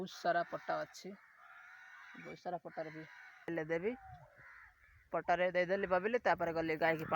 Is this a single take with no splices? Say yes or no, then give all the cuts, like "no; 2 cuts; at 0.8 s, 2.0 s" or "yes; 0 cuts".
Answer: no; 1 cut; at 3.5 s